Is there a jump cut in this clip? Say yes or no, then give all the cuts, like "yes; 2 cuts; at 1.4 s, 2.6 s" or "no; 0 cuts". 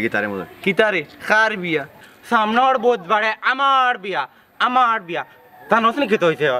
yes; 1 cut; at 2.0 s